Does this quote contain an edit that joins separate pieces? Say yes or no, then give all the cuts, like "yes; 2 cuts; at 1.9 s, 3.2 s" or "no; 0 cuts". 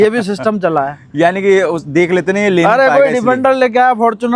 no; 0 cuts